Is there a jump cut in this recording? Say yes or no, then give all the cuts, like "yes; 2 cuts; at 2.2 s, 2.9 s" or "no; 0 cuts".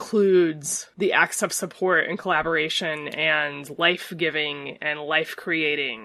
no; 0 cuts